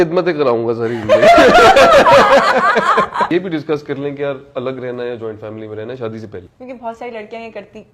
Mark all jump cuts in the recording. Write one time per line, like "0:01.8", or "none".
0:03.3
0:06.5